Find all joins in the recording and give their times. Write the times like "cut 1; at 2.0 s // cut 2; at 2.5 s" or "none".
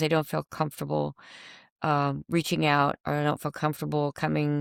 none